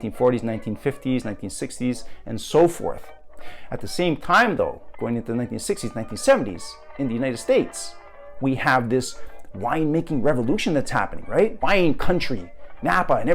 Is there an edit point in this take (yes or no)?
yes